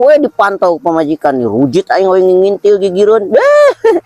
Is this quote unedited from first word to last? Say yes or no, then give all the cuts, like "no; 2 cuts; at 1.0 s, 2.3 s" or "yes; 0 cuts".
yes; 0 cuts